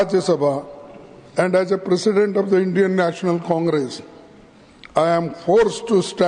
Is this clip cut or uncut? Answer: uncut